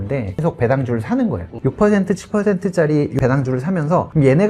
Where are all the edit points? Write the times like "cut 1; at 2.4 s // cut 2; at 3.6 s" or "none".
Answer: cut 1; at 1.5 s // cut 2; at 3.4 s

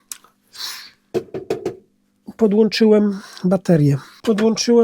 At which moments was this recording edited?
none

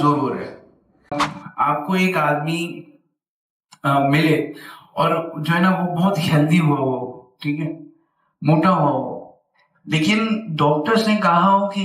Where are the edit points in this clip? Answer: cut 1; at 1.2 s

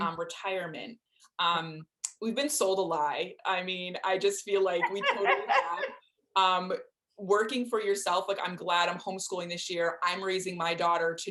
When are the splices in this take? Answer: none

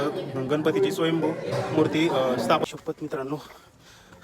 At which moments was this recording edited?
cut 1; at 2.6 s

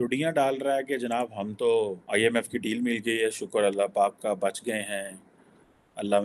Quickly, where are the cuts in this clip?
cut 1; at 2.0 s

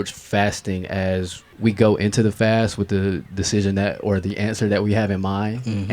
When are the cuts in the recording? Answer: cut 1; at 1.4 s

